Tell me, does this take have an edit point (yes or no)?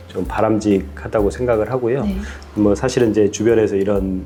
no